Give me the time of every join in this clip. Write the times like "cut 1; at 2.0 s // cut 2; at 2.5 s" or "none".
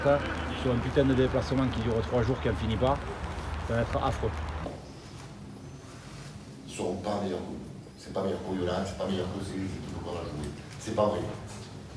cut 1; at 4.7 s

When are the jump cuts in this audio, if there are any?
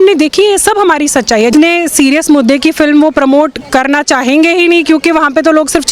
cut 1; at 1.5 s

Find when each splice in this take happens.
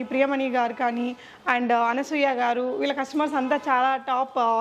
none

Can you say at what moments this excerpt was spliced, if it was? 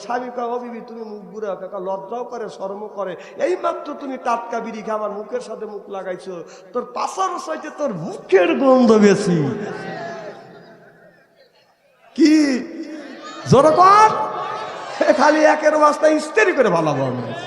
none

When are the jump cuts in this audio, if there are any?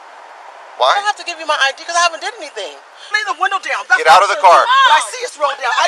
cut 1; at 3.2 s

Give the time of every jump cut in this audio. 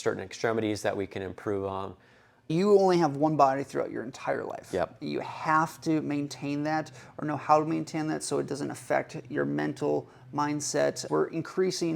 cut 1; at 2.5 s // cut 2; at 11.0 s

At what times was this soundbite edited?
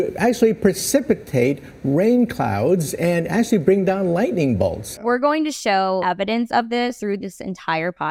cut 1; at 4.9 s // cut 2; at 6.0 s // cut 3; at 7.0 s

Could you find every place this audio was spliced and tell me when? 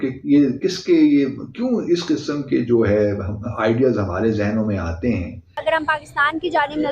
cut 1; at 5.6 s

